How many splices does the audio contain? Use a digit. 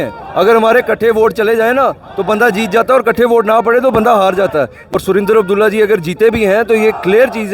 1